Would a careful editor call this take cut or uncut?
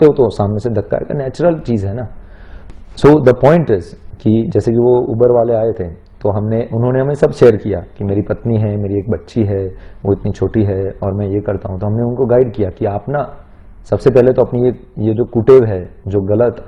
uncut